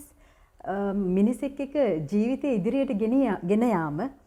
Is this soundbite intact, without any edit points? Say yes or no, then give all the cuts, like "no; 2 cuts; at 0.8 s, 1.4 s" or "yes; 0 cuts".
yes; 0 cuts